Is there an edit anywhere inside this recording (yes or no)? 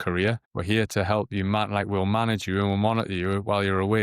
no